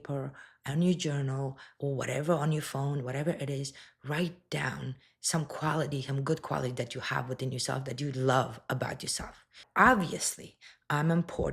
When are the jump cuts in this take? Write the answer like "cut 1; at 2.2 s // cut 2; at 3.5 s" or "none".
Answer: cut 1; at 9.6 s